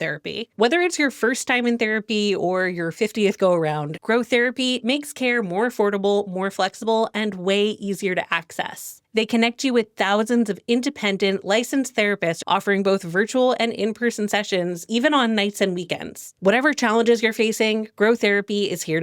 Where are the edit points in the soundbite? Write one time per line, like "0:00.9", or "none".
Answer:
0:03.9
0:09.0
0:12.4
0:16.2